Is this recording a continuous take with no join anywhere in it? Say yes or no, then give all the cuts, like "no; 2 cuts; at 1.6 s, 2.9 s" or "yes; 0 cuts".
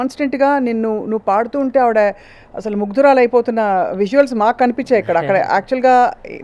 yes; 0 cuts